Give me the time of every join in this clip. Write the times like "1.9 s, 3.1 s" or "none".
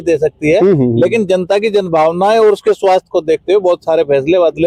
none